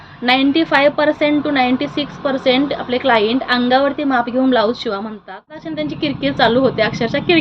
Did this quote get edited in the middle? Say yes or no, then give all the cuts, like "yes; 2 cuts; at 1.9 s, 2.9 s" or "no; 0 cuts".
yes; 1 cut; at 5.7 s